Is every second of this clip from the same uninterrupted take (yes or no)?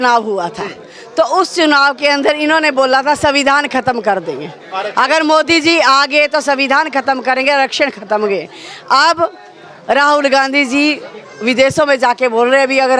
yes